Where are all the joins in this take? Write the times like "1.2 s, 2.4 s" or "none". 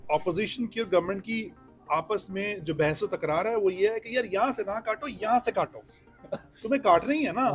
none

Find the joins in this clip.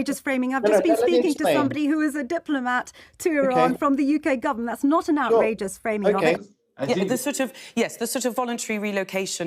6.5 s

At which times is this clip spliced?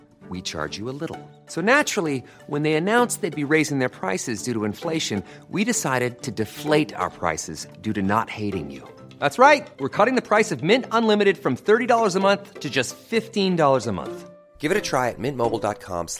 none

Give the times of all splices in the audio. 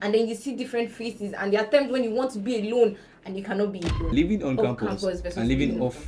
4.1 s

